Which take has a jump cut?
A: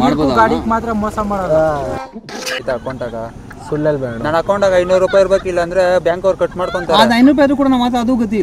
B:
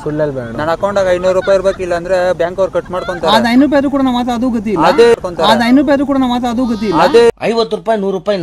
A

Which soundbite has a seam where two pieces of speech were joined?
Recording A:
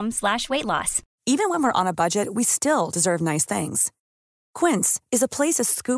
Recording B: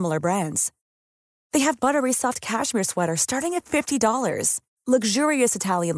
A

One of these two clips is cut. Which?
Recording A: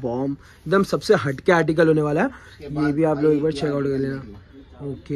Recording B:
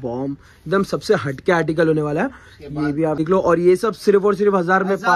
B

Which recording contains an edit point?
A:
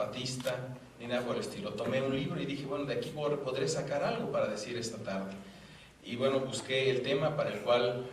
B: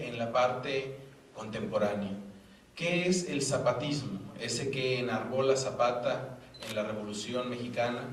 A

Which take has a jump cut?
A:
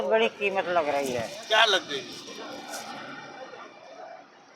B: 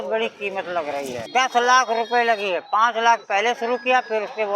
B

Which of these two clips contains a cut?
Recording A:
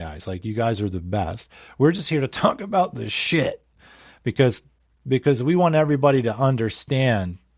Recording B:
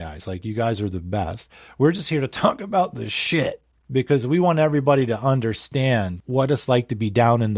B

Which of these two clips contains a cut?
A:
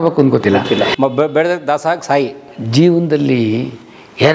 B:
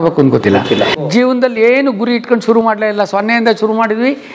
B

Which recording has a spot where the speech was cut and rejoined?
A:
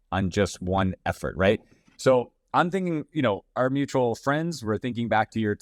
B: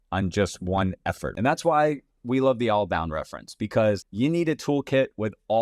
B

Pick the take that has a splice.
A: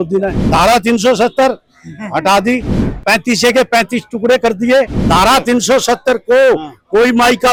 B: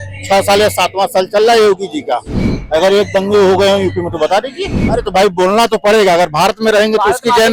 B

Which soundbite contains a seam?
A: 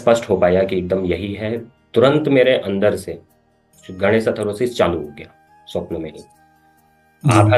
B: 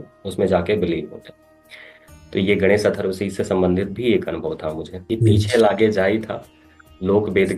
B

